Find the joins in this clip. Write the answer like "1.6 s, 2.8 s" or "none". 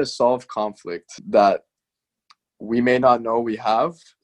1.2 s